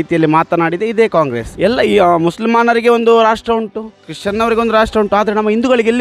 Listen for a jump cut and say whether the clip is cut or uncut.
cut